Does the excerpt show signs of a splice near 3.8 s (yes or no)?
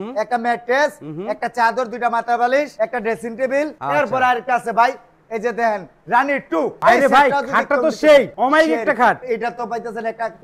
yes